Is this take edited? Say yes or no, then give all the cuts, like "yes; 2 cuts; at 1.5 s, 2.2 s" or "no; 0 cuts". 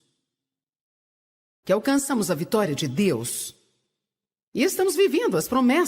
no; 0 cuts